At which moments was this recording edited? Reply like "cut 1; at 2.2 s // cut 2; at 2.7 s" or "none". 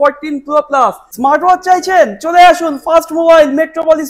cut 1; at 1.1 s